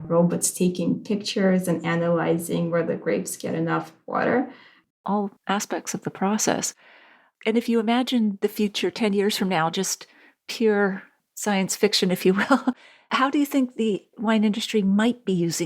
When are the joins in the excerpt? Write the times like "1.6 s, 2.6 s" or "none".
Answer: 4.9 s